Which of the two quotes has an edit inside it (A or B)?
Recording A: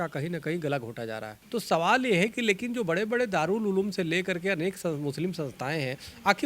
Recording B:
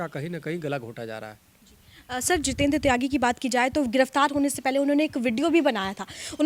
A